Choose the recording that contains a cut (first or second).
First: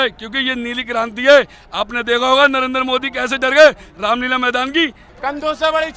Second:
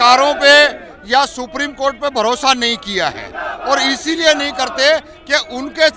first